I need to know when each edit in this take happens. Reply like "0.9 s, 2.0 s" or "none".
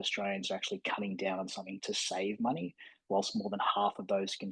1.8 s